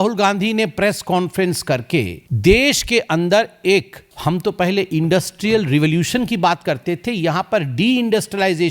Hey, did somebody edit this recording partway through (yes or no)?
yes